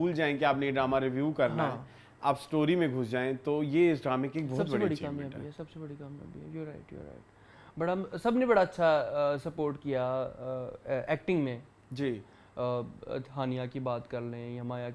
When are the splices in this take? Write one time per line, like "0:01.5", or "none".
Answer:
none